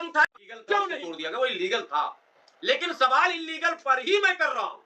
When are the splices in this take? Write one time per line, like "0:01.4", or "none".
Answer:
0:01.0